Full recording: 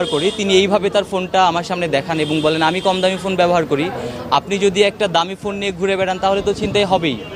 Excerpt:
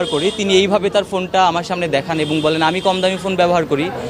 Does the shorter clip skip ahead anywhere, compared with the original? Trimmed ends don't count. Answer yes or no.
no